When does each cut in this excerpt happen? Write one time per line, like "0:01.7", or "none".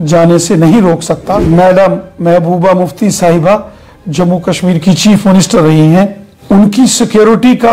0:01.4
0:06.3

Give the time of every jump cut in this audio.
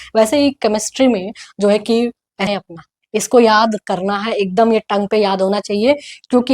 0:02.5

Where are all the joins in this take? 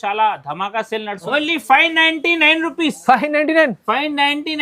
0:01.2

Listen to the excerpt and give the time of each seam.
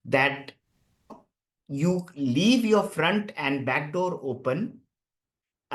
none

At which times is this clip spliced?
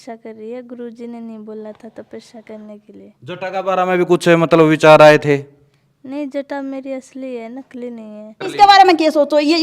0:08.4

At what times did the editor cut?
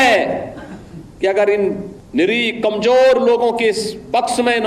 0:01.9

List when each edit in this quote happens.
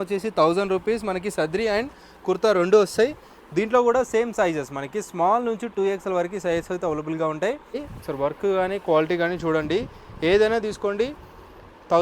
0:07.9

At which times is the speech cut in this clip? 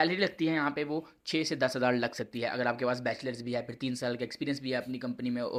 none

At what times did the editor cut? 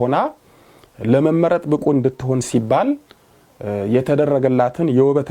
none

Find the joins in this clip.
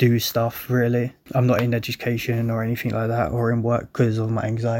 0:01.2

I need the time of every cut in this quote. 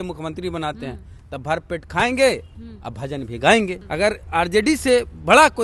0:03.8

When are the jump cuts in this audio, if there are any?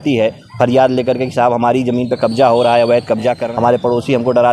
0:03.4

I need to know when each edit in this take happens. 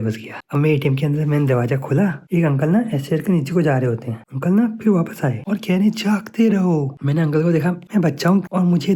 0:02.2
0:04.2
0:05.4

